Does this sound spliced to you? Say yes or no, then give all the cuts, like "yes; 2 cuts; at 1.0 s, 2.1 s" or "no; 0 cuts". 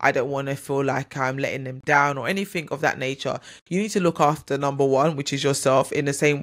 no; 0 cuts